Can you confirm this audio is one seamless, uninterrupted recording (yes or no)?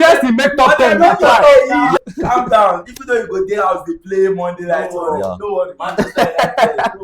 no